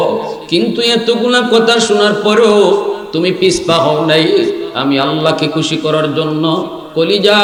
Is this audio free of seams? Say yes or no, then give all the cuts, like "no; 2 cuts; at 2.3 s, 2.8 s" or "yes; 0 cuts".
yes; 0 cuts